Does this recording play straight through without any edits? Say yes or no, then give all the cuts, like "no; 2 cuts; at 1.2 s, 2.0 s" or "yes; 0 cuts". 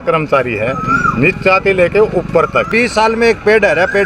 no; 1 cut; at 2.7 s